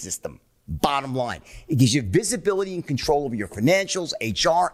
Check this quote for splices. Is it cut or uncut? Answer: uncut